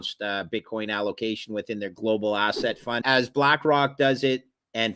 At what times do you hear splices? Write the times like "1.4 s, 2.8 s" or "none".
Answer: 1.9 s, 3.0 s